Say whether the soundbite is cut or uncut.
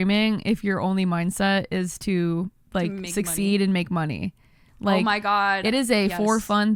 uncut